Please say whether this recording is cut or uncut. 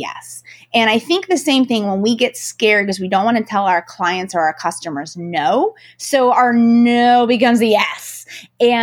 uncut